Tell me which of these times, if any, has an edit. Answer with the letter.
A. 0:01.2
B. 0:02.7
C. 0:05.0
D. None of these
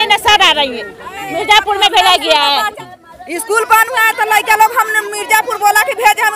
B